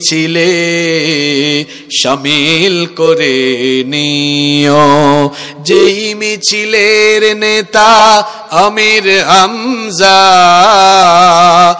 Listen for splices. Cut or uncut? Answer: uncut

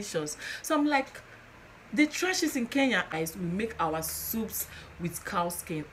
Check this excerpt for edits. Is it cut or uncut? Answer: cut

